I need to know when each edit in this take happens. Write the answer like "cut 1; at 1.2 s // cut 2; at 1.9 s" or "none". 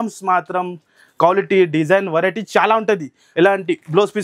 cut 1; at 3.2 s

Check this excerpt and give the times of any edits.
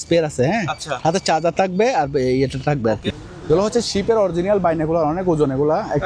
cut 1; at 3.1 s

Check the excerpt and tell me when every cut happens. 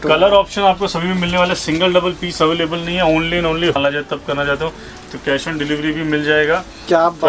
cut 1; at 3.8 s

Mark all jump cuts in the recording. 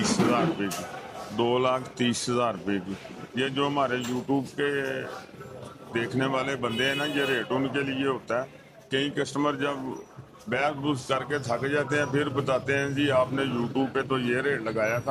none

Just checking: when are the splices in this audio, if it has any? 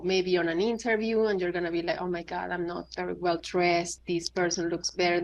cut 1; at 3.9 s

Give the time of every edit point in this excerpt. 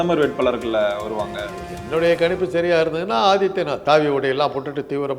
cut 1; at 3.8 s

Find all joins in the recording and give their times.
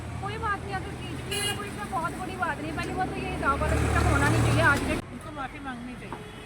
cut 1; at 5.0 s

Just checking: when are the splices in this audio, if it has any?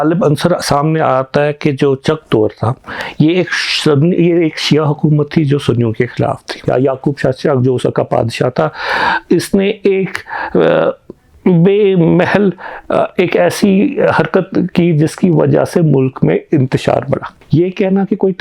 cut 1; at 6.5 s // cut 2; at 17.4 s

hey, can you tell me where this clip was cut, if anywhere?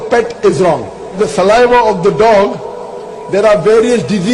cut 1; at 1.2 s

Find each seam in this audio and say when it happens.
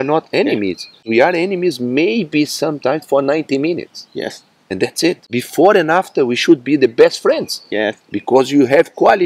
cut 1; at 1.0 s // cut 2; at 5.2 s

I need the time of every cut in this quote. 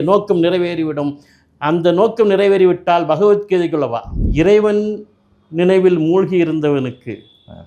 cut 1; at 4.2 s

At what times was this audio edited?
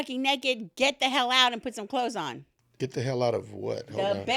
none

